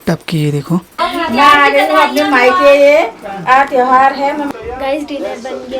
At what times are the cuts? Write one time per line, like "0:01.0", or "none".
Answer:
0:01.0
0:04.5